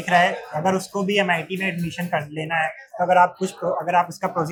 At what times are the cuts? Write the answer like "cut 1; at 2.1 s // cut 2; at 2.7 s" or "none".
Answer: none